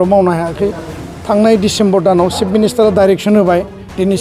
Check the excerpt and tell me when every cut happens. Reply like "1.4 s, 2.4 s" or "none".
none